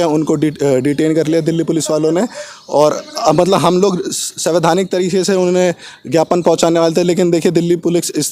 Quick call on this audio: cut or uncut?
uncut